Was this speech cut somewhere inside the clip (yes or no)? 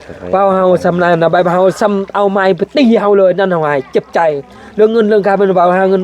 no